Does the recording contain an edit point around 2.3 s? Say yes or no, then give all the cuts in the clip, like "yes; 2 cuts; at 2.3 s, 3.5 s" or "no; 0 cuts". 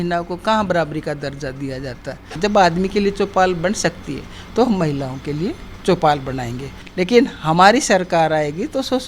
yes; 2 cuts; at 2.3 s, 6.8 s